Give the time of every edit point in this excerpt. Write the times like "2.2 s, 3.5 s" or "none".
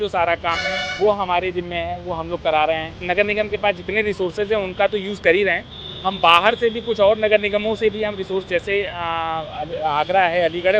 3.0 s